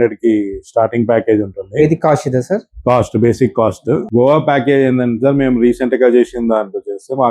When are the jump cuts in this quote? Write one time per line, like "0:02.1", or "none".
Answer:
0:04.1